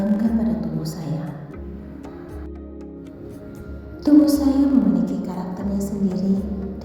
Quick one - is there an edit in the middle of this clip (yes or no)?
yes